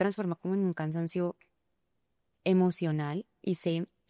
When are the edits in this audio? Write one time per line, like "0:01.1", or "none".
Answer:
none